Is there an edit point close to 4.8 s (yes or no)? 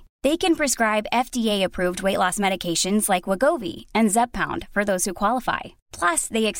no